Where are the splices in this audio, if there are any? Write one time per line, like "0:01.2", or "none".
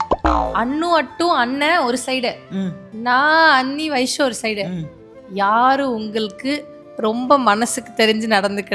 none